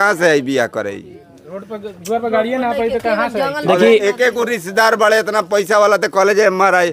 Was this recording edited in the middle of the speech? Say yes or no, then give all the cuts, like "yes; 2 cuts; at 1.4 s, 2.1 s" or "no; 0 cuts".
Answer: no; 0 cuts